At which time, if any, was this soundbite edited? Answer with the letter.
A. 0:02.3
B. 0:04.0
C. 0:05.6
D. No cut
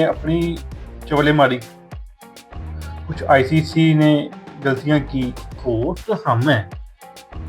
C